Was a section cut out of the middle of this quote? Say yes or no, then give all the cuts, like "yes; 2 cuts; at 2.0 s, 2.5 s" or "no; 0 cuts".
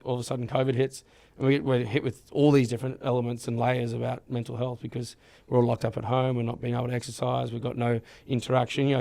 no; 0 cuts